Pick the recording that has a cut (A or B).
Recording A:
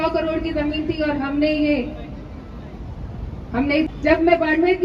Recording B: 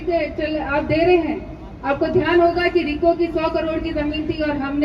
A